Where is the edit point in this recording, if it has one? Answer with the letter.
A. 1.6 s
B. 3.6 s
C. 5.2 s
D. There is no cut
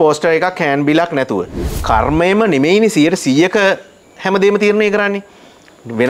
A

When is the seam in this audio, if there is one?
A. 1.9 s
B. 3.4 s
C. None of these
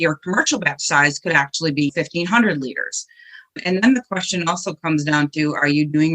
A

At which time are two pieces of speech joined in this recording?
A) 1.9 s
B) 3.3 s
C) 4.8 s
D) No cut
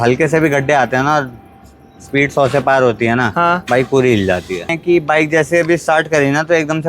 C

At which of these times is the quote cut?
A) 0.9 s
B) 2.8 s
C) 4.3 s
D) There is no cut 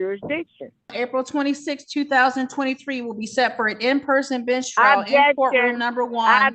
A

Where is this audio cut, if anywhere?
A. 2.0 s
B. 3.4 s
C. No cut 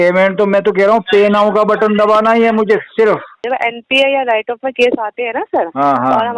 B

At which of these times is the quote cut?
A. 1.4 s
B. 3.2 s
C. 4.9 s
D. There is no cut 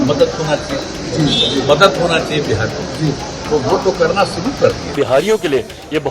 C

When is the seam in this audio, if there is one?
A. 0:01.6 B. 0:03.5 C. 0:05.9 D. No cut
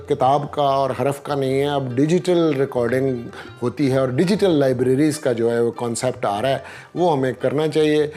D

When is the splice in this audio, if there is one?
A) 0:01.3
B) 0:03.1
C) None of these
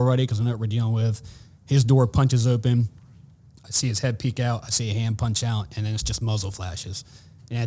C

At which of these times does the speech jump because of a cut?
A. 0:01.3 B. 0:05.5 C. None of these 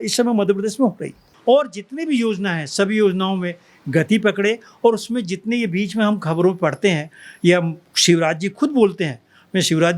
A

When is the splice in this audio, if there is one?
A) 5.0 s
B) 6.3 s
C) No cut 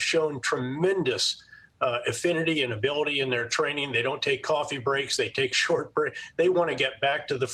C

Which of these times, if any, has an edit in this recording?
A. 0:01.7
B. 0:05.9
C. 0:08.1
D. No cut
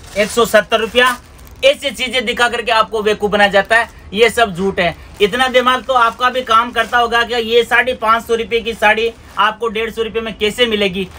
D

